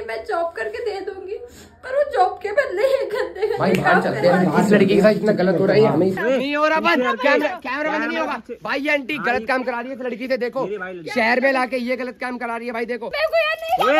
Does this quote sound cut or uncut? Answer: cut